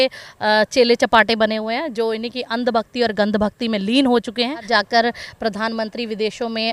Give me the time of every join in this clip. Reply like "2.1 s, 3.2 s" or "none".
4.6 s